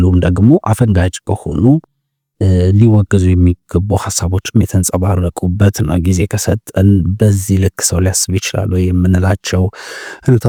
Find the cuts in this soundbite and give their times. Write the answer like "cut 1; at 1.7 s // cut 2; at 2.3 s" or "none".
none